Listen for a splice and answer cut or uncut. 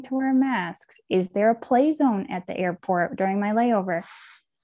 uncut